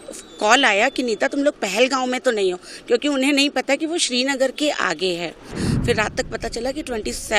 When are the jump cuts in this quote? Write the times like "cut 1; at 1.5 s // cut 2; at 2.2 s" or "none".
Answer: cut 1; at 5.6 s